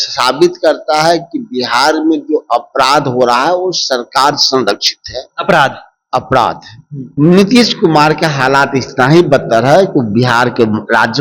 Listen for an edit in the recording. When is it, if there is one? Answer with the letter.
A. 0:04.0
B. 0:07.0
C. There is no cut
B